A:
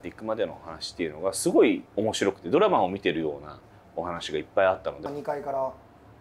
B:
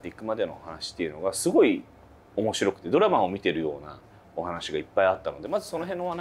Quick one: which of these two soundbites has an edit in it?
A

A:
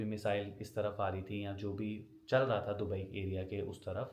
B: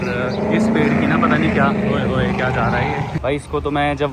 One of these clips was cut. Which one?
B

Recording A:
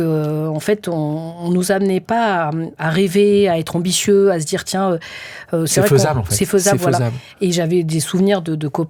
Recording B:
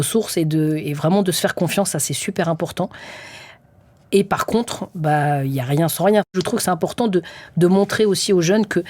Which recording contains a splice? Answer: B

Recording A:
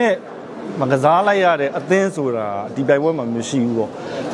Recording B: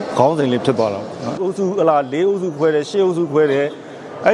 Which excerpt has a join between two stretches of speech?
B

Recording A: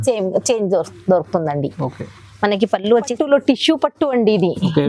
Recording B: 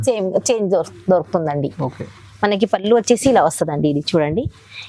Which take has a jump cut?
A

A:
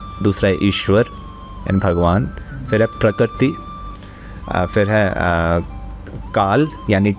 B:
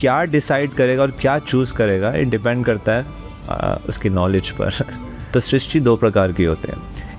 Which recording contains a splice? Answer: B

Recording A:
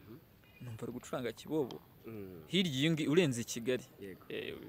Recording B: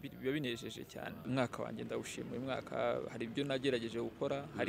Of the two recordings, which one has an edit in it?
B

